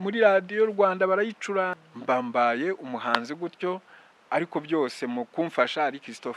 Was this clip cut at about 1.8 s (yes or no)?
yes